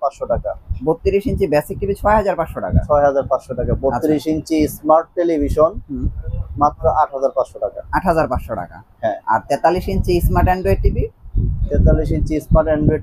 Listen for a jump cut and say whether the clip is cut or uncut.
uncut